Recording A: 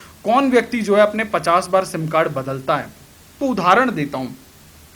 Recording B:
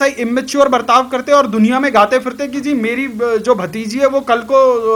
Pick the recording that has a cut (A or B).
A